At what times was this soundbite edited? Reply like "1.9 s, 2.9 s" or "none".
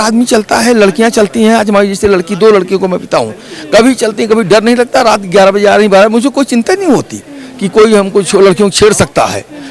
none